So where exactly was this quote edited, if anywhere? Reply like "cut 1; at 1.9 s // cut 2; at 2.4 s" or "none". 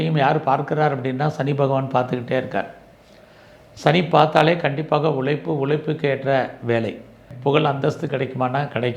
cut 1; at 7.3 s